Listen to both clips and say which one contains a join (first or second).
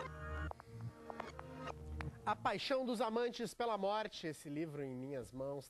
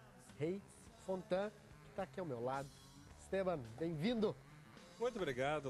first